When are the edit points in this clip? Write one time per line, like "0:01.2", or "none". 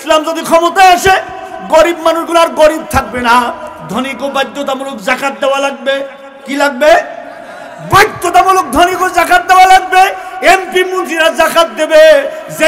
none